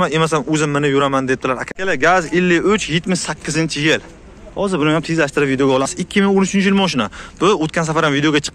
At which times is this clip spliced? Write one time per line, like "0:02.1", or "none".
0:01.7
0:05.9